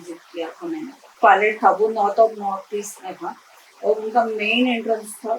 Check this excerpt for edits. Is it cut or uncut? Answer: cut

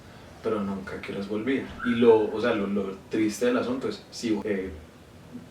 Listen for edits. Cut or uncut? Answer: cut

